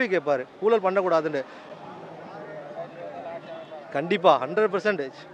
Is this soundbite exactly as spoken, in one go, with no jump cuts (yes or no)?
yes